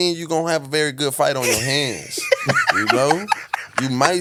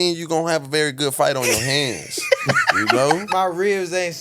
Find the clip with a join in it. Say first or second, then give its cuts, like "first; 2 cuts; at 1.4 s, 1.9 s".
second; 1 cut; at 3.3 s